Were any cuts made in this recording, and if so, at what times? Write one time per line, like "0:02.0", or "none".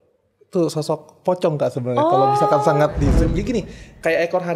0:03.2

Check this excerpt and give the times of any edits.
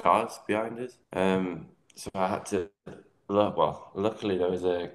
0:01.0

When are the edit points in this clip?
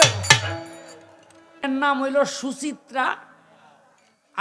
0:01.6

